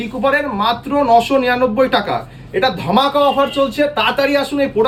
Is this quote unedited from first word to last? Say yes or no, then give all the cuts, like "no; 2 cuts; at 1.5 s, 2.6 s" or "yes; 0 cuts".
yes; 0 cuts